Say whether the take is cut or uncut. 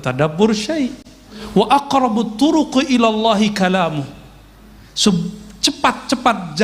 cut